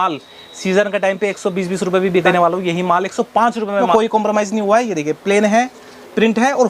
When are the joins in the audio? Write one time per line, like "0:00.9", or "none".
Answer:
0:02.2
0:03.9